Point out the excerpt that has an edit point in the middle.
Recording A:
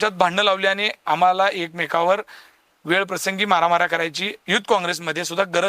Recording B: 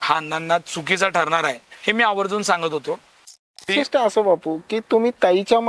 B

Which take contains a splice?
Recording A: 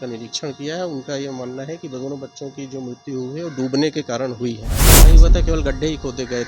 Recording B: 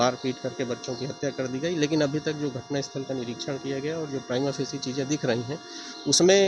A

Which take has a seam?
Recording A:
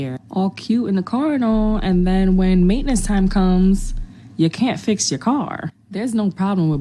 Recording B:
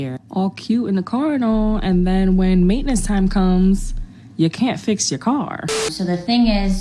B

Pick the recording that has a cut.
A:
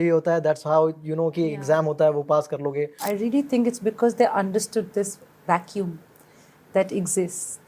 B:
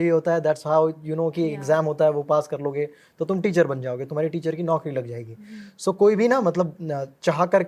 A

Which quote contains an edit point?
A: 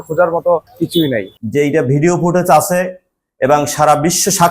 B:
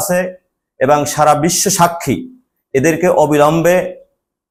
A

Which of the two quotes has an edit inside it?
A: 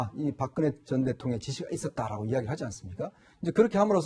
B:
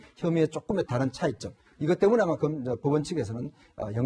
B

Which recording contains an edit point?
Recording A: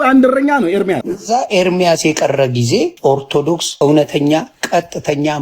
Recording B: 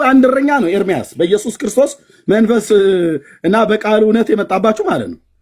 A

